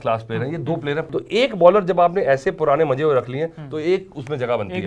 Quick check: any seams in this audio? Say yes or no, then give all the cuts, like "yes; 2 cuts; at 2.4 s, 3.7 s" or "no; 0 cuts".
yes; 1 cut; at 1.0 s